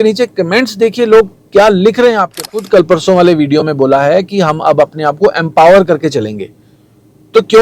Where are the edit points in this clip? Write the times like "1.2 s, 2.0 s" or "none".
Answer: 2.6 s